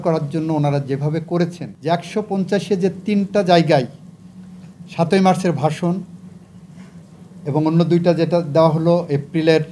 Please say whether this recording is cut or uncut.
cut